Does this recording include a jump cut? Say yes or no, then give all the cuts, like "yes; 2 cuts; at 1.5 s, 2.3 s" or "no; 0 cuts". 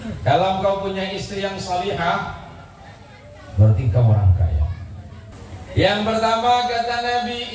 yes; 1 cut; at 5.3 s